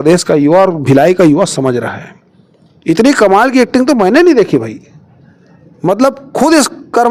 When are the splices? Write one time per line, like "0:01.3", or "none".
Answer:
none